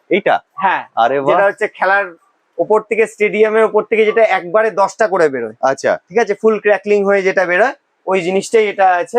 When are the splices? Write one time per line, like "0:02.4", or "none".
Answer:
none